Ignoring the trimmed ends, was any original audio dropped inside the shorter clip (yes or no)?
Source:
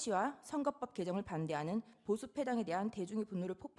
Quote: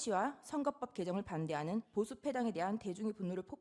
yes